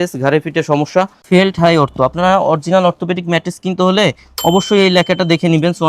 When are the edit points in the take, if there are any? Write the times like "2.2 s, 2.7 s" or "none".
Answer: 1.2 s